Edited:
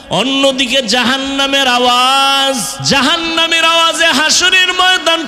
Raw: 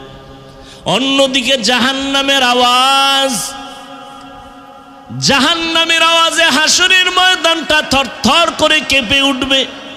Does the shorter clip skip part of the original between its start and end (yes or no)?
yes